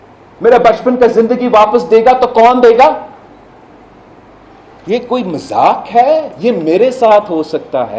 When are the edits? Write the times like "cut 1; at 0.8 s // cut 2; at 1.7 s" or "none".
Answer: none